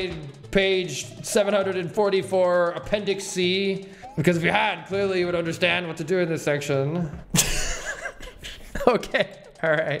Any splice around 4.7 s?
no; 1 cut; at 7.2 s

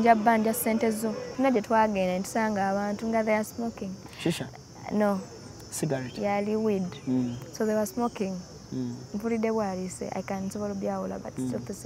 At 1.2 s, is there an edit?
yes; 1 cut; at 1.2 s

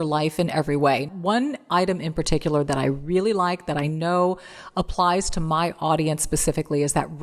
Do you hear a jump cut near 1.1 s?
yes; 1 cut; at 1.1 s

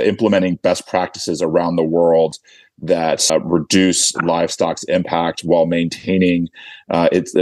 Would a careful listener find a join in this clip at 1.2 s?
no; 1 cut; at 3.3 s

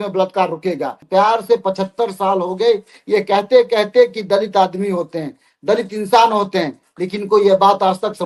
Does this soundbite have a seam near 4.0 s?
no; 1 cut; at 1.0 s

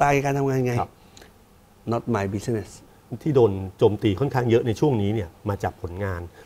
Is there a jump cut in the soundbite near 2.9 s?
yes; 1 cut; at 2.9 s

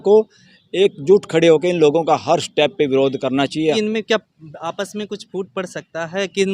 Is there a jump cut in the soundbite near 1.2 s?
no; 1 cut; at 3.7 s

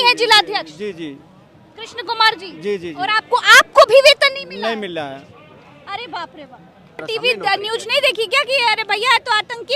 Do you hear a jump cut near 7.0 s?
yes; 1 cut; at 7.0 s

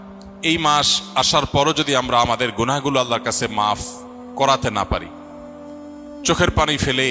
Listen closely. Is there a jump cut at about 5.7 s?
no; 0 cuts

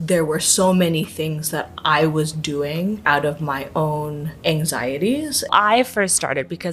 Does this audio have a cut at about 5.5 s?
yes; 2 cuts; at 3.0 s, 5.5 s

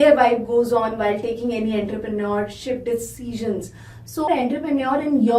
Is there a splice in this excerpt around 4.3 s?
yes; 1 cut; at 4.3 s

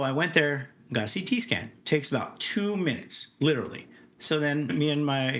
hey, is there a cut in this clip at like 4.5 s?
yes; 1 cut; at 4.5 s

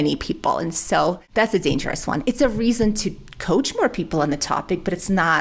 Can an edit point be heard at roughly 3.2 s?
no; 1 cut; at 1.2 s

